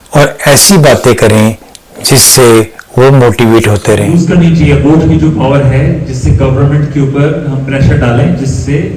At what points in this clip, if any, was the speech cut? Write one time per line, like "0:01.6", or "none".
0:04.1